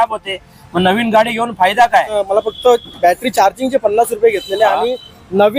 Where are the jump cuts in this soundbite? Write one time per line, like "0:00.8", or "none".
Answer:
0:02.2